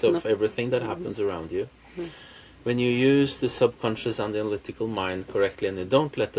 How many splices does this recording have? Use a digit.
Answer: 0